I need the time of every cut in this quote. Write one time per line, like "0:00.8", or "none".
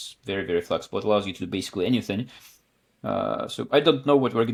none